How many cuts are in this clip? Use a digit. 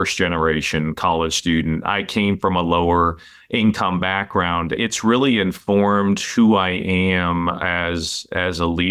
1